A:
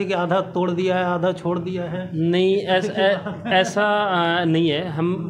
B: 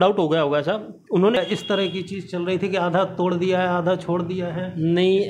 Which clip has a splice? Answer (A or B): B